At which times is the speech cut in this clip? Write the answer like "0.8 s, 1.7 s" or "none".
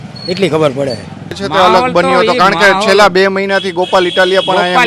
1.4 s